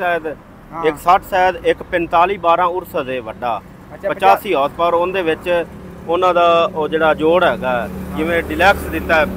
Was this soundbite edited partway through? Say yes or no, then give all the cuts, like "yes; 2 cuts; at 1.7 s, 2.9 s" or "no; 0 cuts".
no; 0 cuts